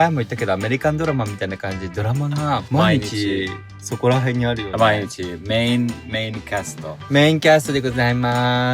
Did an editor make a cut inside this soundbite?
yes; 1 cut; at 2.7 s

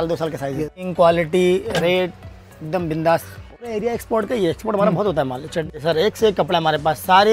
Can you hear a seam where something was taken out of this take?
yes; 3 cuts; at 0.8 s, 3.6 s, 5.7 s

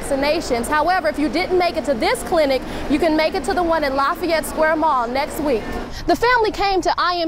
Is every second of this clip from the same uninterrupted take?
no; 1 cut; at 5.7 s

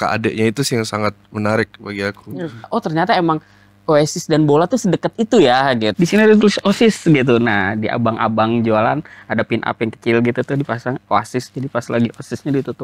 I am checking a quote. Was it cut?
yes; 2 cuts; at 2.7 s, 5.9 s

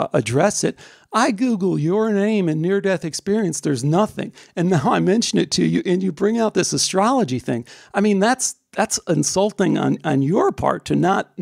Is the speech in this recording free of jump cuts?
yes; 0 cuts

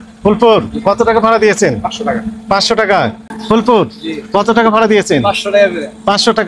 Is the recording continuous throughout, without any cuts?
no; 1 cut; at 3.3 s

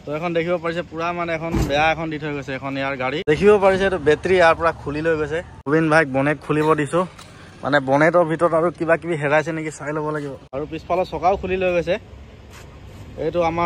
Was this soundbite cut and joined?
yes; 3 cuts; at 3.2 s, 5.5 s, 10.4 s

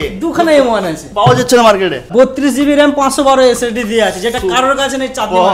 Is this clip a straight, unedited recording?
no; 1 cut; at 2.0 s

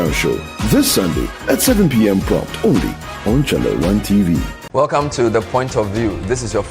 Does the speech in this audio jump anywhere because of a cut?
yes; 1 cut; at 4.6 s

